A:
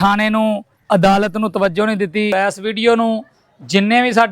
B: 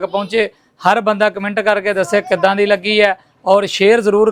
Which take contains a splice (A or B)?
A